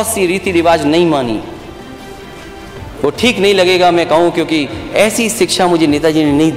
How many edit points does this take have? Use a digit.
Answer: 0